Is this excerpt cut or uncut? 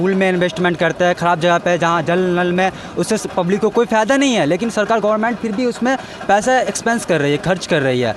uncut